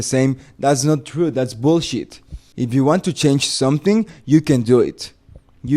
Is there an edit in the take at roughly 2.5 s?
yes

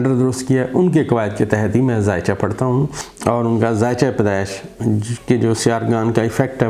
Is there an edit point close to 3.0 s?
yes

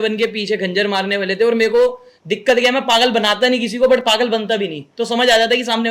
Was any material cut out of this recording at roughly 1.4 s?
no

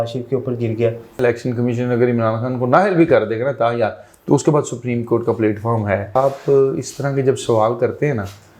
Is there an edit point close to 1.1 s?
yes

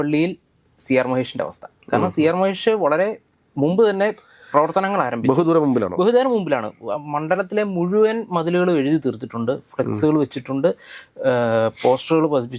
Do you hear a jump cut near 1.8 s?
no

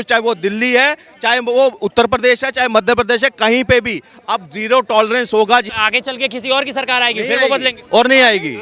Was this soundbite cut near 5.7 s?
yes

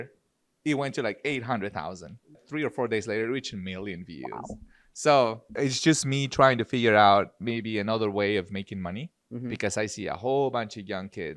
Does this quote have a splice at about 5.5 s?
yes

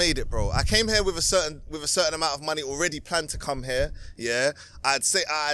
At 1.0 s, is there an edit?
no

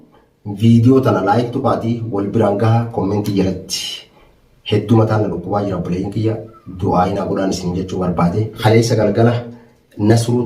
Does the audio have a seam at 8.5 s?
yes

